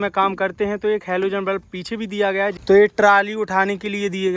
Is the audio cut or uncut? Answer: cut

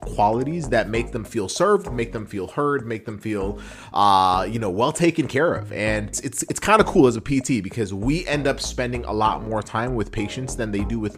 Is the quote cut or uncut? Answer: cut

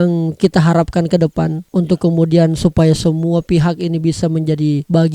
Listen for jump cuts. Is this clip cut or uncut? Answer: uncut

